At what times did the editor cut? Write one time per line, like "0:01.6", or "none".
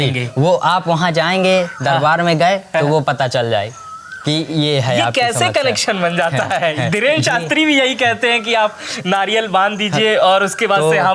none